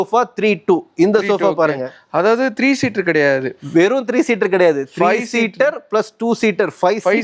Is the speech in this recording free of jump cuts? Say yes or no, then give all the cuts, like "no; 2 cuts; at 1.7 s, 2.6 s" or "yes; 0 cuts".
yes; 0 cuts